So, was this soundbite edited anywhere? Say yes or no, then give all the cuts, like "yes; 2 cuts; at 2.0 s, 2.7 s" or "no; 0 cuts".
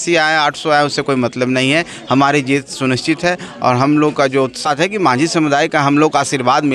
yes; 1 cut; at 4.7 s